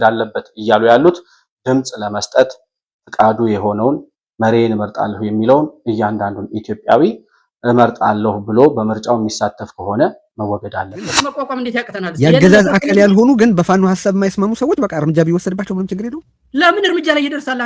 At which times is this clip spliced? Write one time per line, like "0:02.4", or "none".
0:11.4